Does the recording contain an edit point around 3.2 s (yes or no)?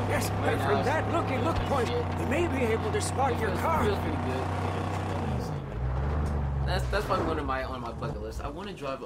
no